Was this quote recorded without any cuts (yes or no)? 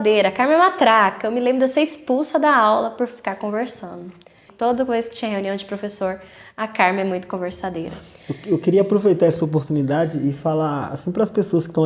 no